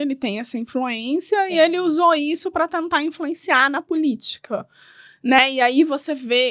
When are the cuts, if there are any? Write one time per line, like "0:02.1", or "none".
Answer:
none